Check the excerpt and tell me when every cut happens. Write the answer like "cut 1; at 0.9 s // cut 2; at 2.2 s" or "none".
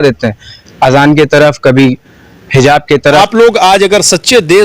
cut 1; at 3.2 s

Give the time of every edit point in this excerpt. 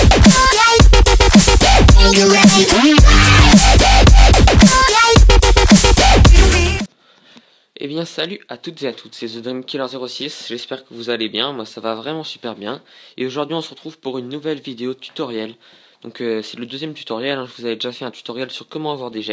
none

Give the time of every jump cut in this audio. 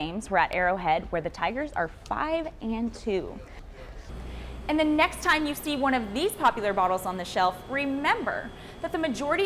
cut 1; at 4.0 s

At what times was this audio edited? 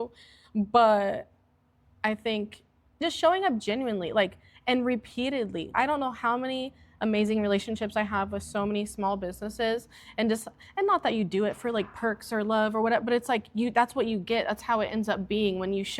cut 1; at 3.0 s // cut 2; at 5.7 s

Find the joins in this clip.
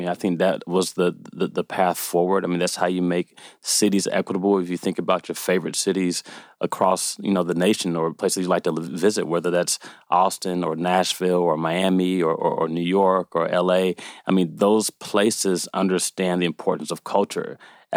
none

